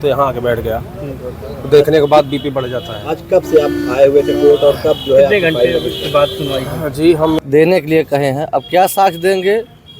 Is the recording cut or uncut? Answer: cut